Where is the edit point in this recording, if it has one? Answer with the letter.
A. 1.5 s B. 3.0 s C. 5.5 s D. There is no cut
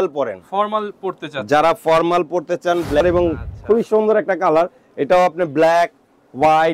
B